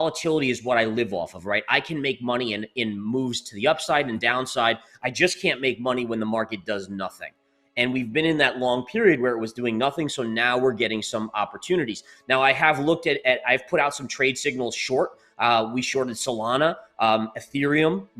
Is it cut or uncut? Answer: uncut